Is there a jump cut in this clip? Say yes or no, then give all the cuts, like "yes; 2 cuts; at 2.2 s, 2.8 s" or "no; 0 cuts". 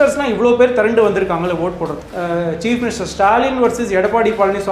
yes; 1 cut; at 2.0 s